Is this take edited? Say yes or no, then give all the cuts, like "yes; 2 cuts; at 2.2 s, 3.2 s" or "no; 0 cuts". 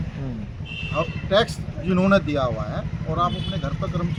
no; 0 cuts